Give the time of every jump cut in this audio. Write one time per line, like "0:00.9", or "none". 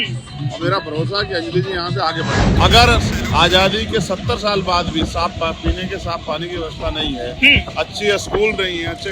0:02.6